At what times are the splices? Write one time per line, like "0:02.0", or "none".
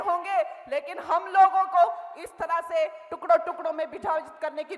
none